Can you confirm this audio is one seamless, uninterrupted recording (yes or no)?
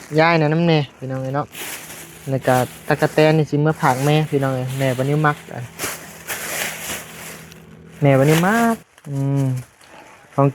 no